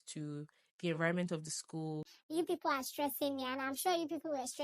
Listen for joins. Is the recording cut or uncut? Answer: cut